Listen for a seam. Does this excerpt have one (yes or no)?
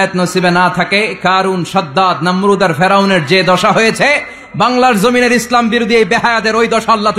no